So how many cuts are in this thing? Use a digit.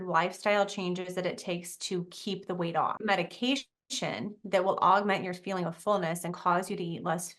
1